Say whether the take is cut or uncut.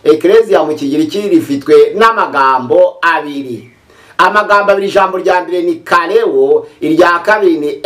uncut